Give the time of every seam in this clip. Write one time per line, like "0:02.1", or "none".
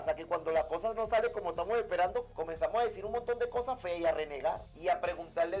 0:02.3
0:04.7

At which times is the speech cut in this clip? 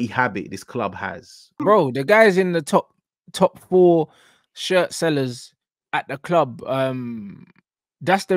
0:01.6

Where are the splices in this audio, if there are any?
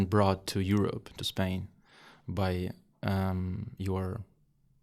none

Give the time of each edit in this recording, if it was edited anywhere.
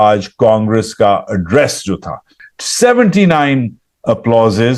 0:02.3

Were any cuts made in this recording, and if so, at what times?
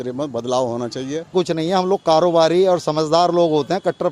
0:01.3

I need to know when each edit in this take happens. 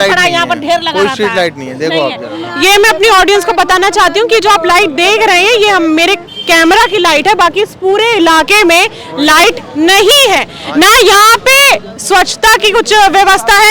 none

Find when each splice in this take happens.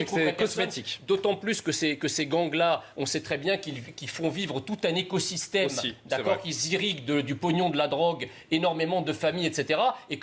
none

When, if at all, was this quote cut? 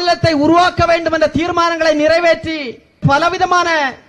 0:03.0

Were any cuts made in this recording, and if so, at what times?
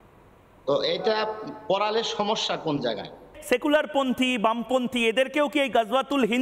0:03.3

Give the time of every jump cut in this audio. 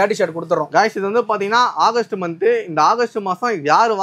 none

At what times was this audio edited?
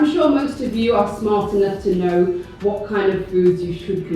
none

